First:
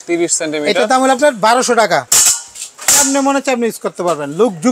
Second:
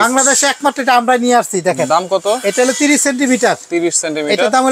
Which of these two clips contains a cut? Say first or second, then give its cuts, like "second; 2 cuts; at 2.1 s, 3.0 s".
first; 1 cut; at 2.1 s